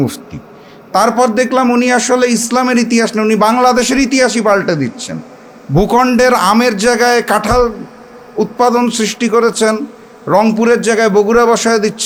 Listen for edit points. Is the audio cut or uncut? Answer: uncut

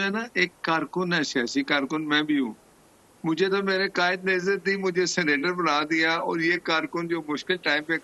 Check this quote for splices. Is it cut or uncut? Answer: uncut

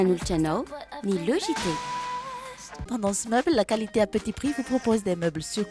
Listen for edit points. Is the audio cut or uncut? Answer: uncut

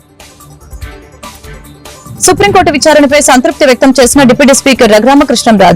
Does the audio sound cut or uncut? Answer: cut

